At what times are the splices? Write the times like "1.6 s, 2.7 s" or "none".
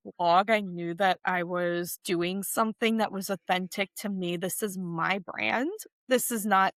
none